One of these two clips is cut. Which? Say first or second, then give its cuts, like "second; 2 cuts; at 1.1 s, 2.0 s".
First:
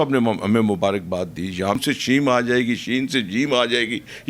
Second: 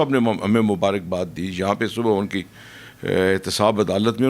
first; 1 cut; at 1.8 s